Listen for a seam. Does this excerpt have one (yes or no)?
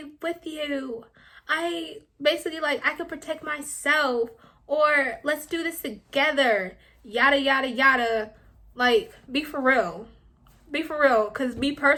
no